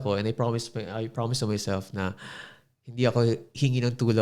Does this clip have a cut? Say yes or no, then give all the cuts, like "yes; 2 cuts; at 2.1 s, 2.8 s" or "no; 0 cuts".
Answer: no; 0 cuts